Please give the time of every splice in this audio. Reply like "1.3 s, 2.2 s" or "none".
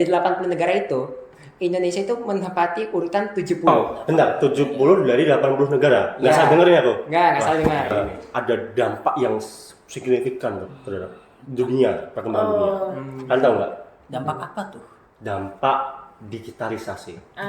3.7 s, 7.9 s